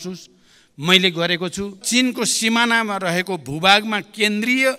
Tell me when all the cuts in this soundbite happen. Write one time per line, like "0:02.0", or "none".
0:01.8